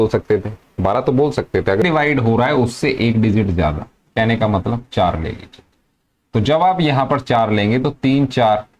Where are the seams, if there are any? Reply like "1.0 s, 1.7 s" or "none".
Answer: 1.8 s